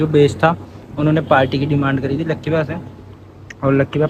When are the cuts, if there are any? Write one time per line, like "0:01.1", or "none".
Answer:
none